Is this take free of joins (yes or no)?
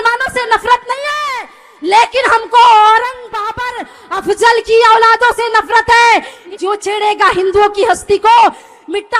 no